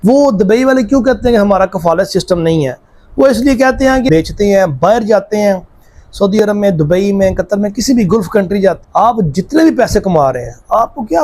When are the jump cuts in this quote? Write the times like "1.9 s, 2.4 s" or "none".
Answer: 4.1 s, 8.8 s